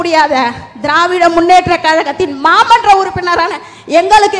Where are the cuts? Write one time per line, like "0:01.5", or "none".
none